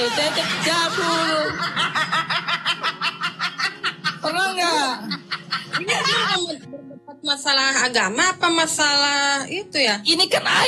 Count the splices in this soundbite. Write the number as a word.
zero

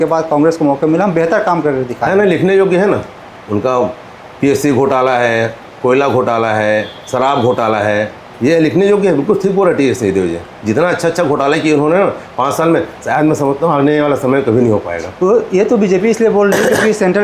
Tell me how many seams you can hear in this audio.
zero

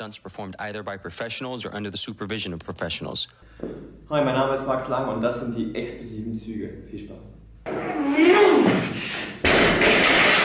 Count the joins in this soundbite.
zero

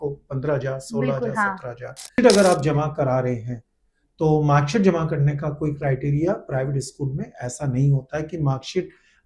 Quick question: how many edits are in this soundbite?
one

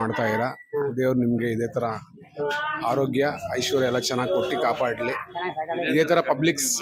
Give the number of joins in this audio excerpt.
zero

